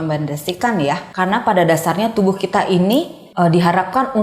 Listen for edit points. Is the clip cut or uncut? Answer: cut